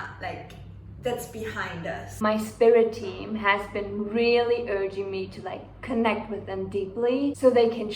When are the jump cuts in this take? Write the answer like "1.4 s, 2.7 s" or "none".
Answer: 2.1 s